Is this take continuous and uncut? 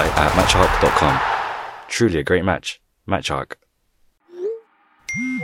no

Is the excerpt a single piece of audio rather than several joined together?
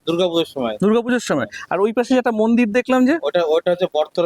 yes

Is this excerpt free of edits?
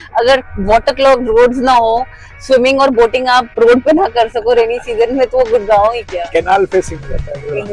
yes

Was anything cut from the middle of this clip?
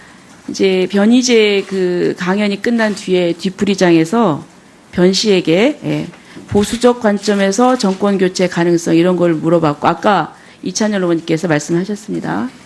yes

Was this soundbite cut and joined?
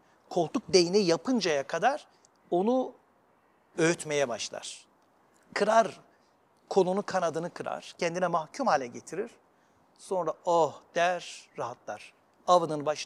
no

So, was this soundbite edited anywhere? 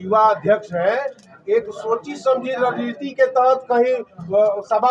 no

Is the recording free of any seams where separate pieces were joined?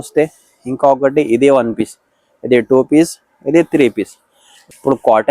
no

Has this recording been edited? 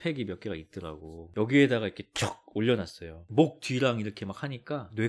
yes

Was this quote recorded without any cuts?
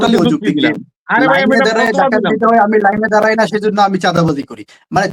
yes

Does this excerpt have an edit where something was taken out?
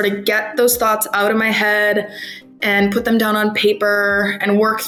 no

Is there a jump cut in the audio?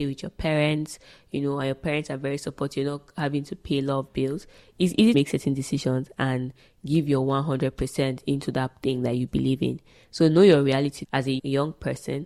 no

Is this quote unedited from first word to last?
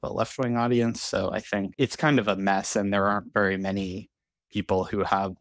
no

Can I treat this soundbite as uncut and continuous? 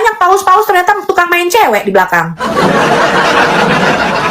no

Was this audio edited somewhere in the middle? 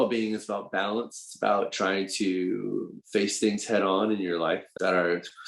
yes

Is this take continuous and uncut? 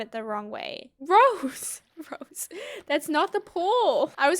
no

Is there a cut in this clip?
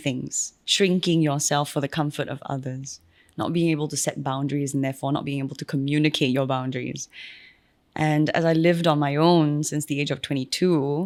no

